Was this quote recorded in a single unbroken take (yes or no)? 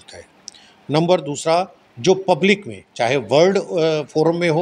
yes